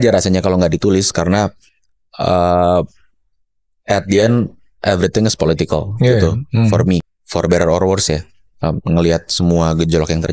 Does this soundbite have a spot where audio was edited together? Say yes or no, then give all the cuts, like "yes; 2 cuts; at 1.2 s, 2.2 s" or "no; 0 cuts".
yes; 1 cut; at 7.2 s